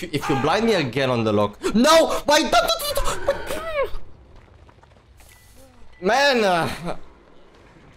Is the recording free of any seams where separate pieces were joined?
yes; 0 cuts

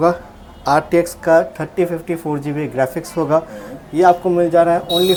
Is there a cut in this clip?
no; 0 cuts

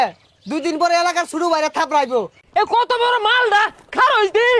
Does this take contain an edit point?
yes; 1 cut; at 2.4 s

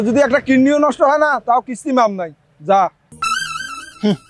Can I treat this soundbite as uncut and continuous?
no; 1 cut; at 3.1 s

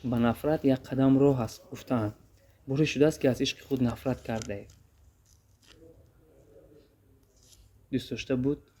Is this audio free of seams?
yes; 0 cuts

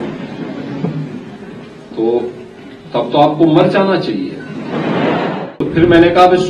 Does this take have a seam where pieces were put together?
yes; 1 cut; at 5.6 s

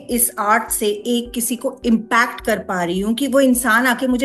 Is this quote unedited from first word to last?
yes; 0 cuts

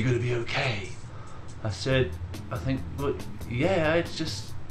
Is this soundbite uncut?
yes; 0 cuts

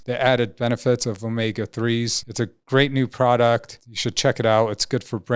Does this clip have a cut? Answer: no; 0 cuts

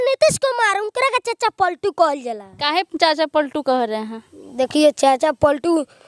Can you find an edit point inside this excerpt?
no; 0 cuts

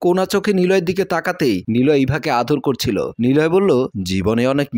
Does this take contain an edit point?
yes; 1 cut; at 1.6 s

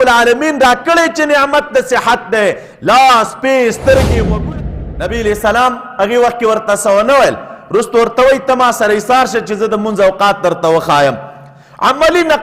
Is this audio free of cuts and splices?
no; 1 cut; at 4.4 s

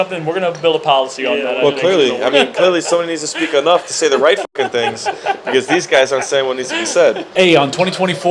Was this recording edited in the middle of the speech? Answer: yes; 1 cut; at 7.3 s

